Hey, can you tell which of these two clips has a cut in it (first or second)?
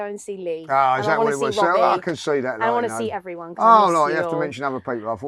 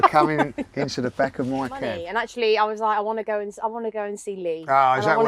second